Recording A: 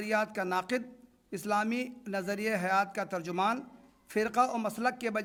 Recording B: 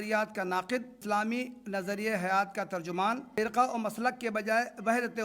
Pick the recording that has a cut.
B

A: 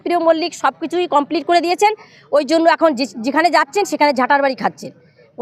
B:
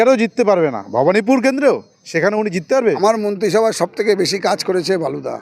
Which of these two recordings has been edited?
B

